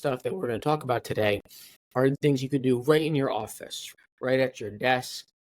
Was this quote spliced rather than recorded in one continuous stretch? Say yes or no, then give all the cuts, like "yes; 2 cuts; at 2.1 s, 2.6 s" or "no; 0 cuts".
yes; 2 cuts; at 2.2 s, 3.9 s